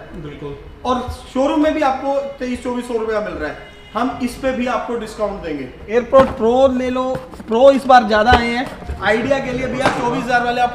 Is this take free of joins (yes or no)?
no